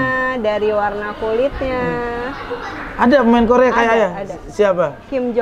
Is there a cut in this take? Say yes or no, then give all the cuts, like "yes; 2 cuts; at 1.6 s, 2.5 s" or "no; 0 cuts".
no; 0 cuts